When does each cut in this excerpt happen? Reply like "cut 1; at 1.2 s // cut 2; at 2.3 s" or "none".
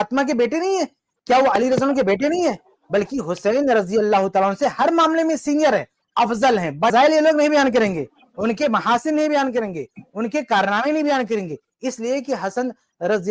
cut 1; at 6.9 s